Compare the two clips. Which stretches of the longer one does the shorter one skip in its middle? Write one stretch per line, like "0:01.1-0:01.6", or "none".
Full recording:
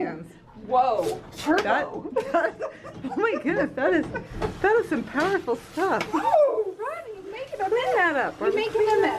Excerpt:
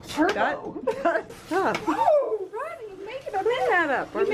0:02.7-0:05.7